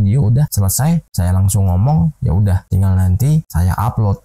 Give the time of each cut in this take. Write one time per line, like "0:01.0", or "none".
none